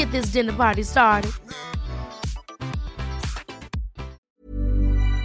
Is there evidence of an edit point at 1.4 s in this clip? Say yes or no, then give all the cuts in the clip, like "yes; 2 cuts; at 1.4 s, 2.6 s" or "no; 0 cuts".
no; 1 cut; at 4.2 s